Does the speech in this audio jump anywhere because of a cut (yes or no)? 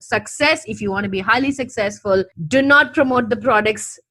no